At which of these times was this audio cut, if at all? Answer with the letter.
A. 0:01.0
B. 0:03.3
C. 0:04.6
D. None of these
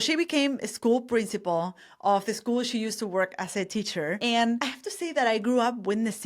C